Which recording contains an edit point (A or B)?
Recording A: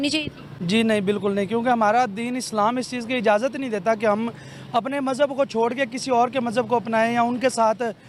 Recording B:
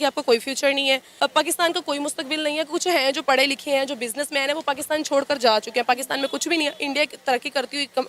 B